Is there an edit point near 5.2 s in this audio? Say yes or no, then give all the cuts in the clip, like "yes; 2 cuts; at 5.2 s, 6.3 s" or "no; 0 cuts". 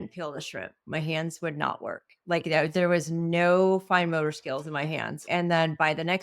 yes; 1 cut; at 5.2 s